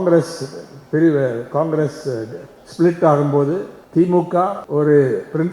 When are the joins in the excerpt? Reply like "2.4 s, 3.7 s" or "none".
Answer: 3.8 s, 4.6 s